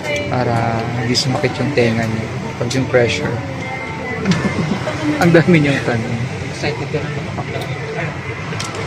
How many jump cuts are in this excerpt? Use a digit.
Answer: 1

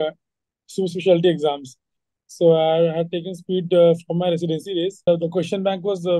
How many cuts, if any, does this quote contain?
1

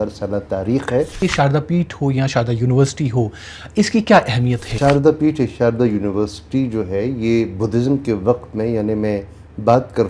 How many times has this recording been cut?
2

